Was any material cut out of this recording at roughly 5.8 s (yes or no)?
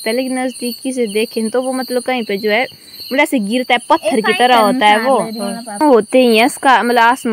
yes